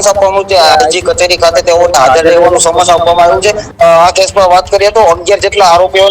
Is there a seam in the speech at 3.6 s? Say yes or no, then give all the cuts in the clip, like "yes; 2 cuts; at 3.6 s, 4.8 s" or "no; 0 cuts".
yes; 1 cut; at 3.6 s